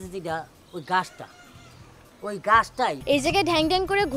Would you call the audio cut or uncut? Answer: cut